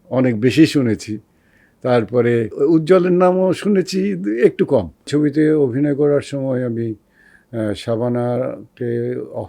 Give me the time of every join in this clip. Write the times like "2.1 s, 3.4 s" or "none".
2.5 s, 5.1 s